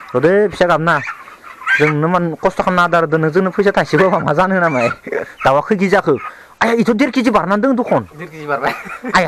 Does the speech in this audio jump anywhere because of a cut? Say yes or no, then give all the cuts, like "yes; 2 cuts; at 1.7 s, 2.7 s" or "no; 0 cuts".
yes; 1 cut; at 5.3 s